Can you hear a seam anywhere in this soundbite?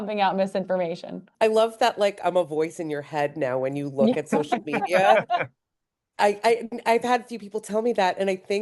yes; 1 cut; at 1.3 s

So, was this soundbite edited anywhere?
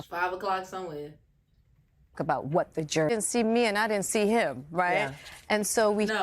yes; 1 cut; at 3.1 s

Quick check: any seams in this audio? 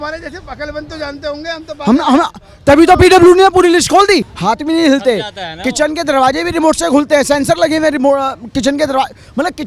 no; 0 cuts

